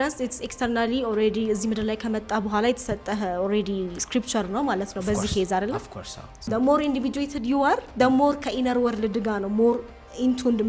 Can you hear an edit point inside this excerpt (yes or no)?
yes